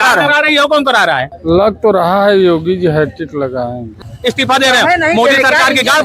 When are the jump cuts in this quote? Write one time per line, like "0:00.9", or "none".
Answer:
0:01.3
0:04.0